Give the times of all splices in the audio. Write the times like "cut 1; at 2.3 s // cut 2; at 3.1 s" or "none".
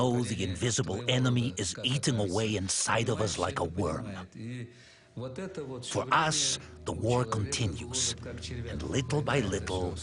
cut 1; at 3.6 s